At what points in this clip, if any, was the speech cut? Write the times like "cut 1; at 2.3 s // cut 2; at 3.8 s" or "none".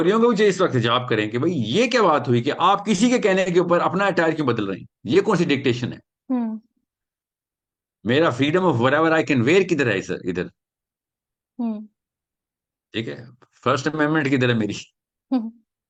none